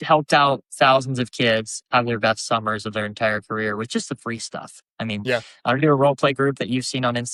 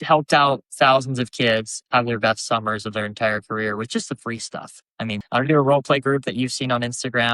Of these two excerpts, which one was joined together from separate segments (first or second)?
second